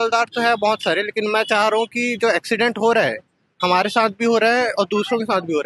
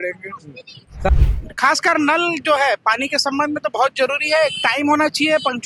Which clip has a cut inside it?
second; 1 cut; at 1.1 s

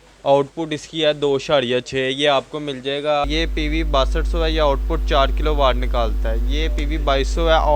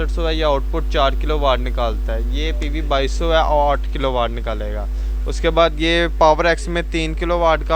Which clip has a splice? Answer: first; 1 cut; at 3.2 s

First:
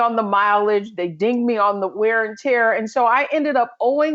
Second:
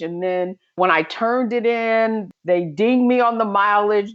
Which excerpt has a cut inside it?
second; 2 cuts; at 0.8 s, 2.3 s

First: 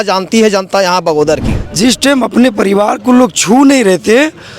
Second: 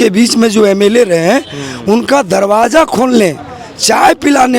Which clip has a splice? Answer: first; 1 cut; at 1.6 s

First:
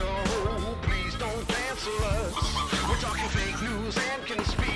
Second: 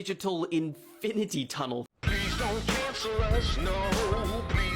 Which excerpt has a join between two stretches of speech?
second; 1 cut; at 1.9 s

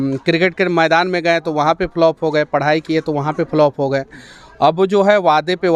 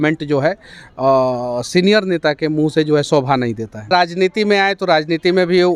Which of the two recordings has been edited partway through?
second; 1 cut; at 3.9 s

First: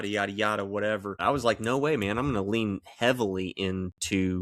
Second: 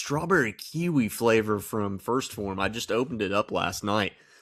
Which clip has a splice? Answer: first; 1 cut; at 1.2 s

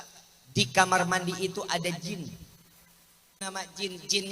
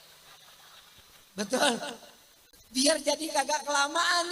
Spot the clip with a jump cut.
first; 1 cut; at 3.4 s

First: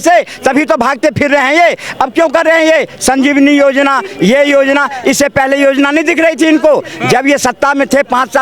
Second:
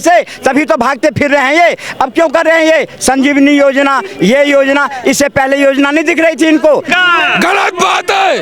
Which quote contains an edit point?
second; 1 cut; at 6.9 s

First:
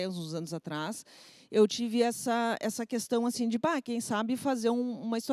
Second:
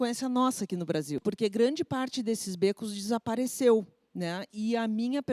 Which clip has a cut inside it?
second; 1 cut; at 1.2 s

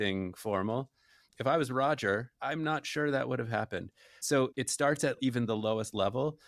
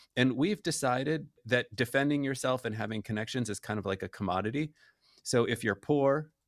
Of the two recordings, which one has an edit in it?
first; 3 cuts; at 1.4 s, 2.3 s, 4.3 s

